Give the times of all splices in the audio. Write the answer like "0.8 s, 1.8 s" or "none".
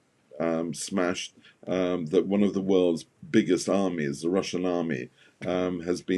none